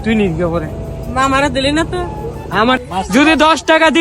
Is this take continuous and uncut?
no; 1 cut; at 2.8 s

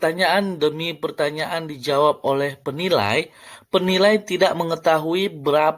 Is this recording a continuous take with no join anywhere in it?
yes; 0 cuts

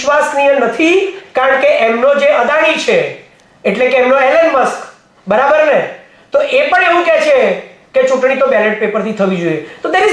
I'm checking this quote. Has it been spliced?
no; 0 cuts

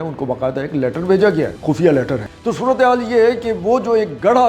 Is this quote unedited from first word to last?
no; 2 cuts; at 1.6 s, 2.2 s

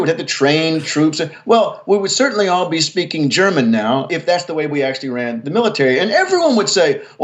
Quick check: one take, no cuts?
no; 1 cut; at 4.1 s

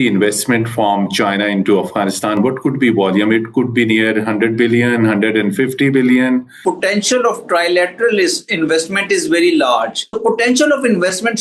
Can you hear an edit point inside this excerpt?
yes; 2 cuts; at 6.6 s, 10.2 s

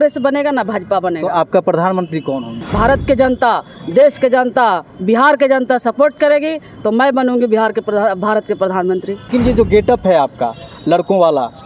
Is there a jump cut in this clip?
yes; 2 cuts; at 2.6 s, 9.3 s

